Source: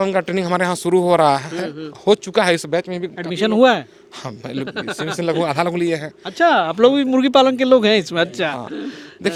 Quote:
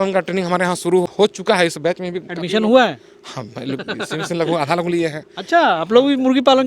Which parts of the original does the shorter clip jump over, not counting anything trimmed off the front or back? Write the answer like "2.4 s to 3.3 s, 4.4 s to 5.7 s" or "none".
1.1 s to 1.9 s